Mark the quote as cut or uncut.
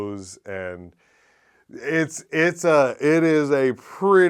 uncut